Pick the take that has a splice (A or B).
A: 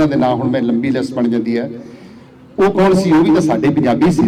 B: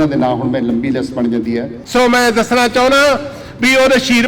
B